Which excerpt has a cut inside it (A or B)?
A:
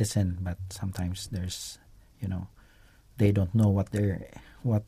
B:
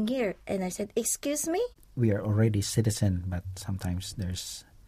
B